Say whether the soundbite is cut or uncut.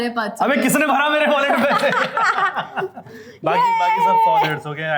uncut